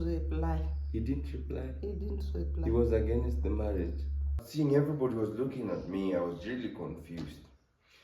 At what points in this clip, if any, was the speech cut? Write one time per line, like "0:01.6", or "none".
0:04.4